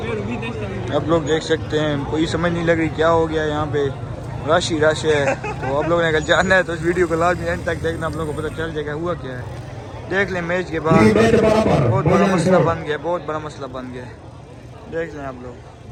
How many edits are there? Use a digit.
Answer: 0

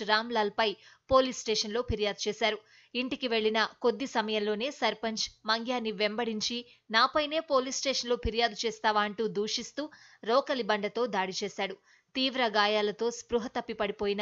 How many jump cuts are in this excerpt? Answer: 0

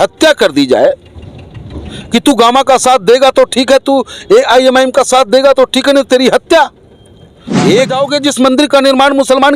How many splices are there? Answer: 1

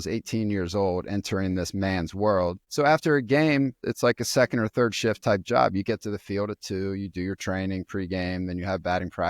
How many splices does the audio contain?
2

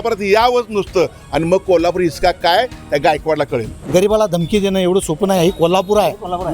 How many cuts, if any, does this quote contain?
1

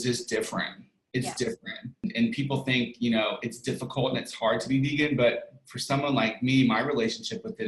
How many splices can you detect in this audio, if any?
1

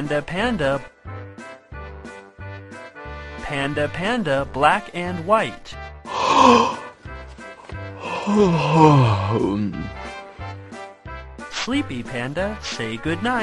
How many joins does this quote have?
3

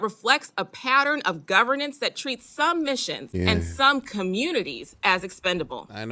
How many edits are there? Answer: 1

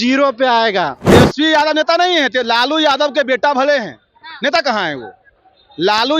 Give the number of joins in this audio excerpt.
1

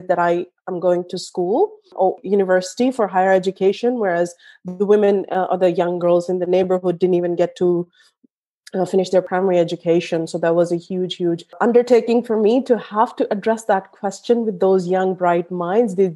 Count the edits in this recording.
3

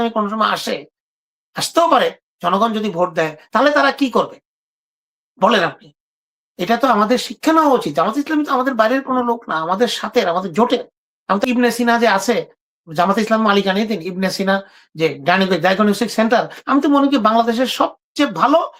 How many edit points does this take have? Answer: 1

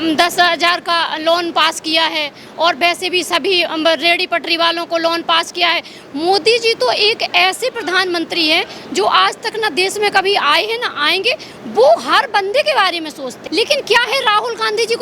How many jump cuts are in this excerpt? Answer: 1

